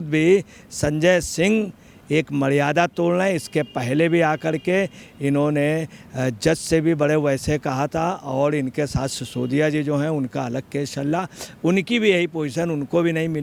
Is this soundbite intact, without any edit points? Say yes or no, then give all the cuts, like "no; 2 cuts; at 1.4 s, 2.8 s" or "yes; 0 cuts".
yes; 0 cuts